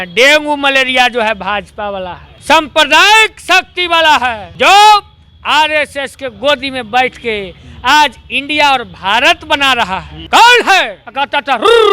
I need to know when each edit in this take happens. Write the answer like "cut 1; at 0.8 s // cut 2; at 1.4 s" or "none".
cut 1; at 2.3 s // cut 2; at 4.4 s // cut 3; at 10.1 s // cut 4; at 11.0 s